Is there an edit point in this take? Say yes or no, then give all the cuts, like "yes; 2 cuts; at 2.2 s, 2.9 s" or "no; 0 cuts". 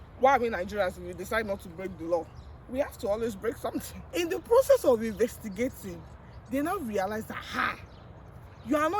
yes; 1 cut; at 4.0 s